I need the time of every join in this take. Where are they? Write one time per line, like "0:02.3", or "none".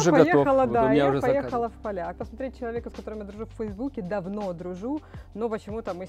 none

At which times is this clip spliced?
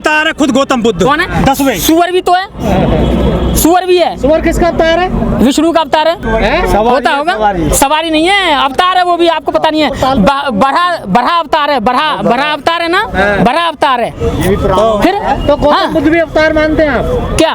none

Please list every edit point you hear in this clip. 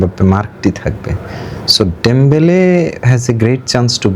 none

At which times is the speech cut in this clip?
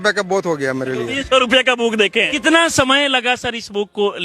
0:02.3

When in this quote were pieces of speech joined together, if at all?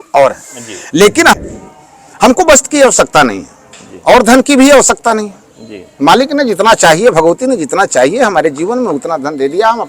0:01.4

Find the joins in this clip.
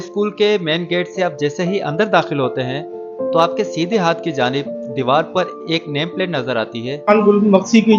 0:07.1

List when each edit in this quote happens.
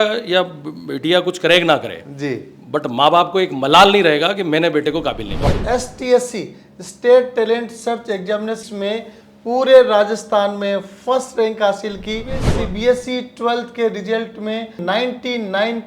0:05.5
0:08.6
0:12.5
0:14.8

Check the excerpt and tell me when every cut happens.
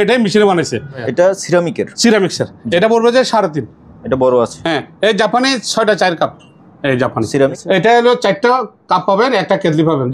0:01.0
0:07.6

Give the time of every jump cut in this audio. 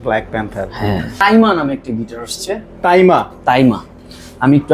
0:01.2

